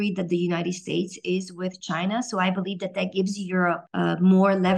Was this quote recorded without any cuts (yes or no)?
no